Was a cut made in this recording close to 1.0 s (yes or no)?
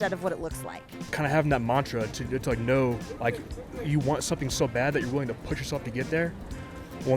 yes